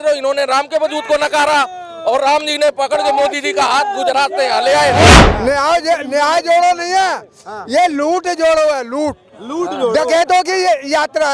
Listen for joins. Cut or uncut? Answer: cut